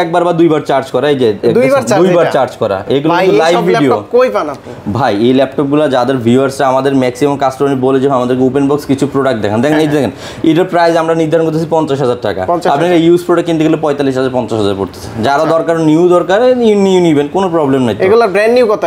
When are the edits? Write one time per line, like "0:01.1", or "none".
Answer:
none